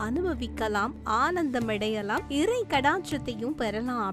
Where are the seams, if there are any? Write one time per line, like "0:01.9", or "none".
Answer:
0:02.2